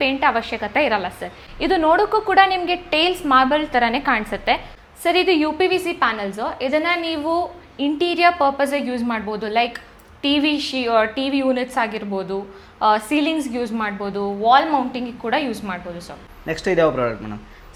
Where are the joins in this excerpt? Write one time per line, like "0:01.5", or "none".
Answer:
none